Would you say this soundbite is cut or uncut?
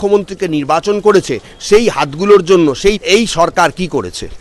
cut